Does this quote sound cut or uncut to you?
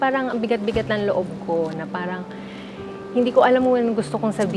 uncut